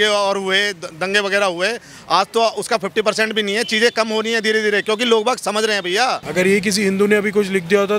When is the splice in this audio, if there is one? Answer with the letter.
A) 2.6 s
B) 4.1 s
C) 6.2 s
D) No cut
C